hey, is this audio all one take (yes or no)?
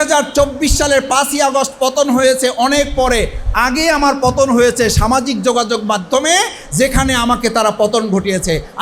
yes